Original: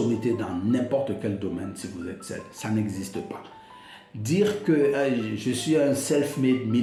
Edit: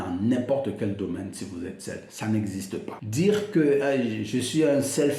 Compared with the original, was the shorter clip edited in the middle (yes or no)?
yes